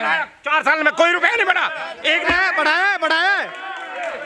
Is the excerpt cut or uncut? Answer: uncut